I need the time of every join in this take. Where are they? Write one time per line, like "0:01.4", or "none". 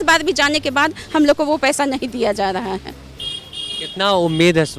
none